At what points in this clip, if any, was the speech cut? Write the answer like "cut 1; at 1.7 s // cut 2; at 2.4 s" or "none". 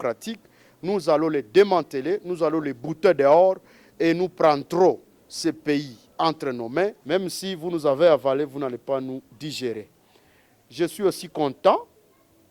cut 1; at 7.0 s